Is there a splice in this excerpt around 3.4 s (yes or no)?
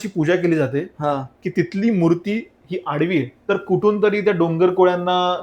yes